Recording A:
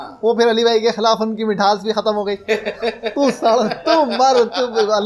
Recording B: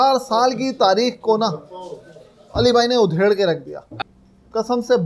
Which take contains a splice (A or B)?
B